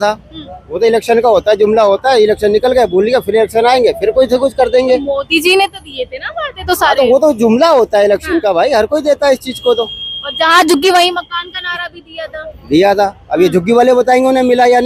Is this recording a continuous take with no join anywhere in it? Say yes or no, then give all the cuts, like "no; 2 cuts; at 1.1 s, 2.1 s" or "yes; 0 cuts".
yes; 0 cuts